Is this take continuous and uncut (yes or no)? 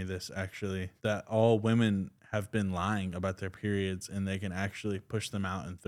no